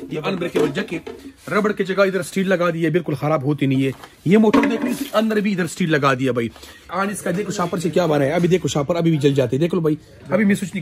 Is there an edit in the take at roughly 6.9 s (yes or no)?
yes